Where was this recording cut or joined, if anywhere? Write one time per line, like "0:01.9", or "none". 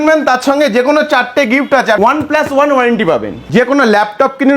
0:02.0
0:03.4